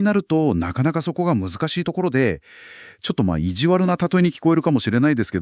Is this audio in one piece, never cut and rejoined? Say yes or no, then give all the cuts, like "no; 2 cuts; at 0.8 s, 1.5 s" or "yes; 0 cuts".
yes; 0 cuts